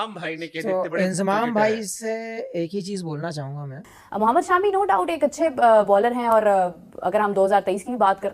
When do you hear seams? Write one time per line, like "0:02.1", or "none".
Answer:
0:03.9